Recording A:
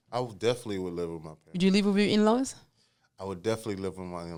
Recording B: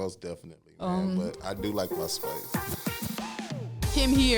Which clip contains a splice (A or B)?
B